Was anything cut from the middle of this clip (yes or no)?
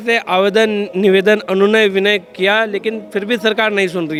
no